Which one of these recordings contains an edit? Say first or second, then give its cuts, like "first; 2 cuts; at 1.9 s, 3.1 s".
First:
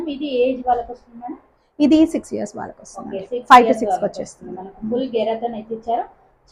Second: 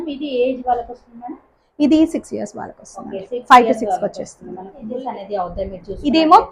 second; 1 cut; at 5.0 s